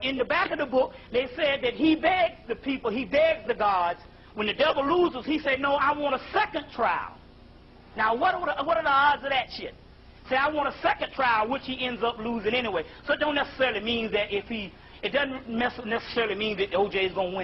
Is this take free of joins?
yes; 0 cuts

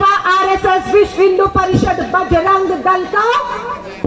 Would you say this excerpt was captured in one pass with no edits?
yes; 0 cuts

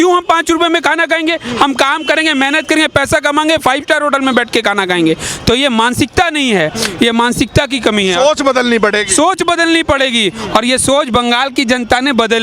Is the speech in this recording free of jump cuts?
yes; 0 cuts

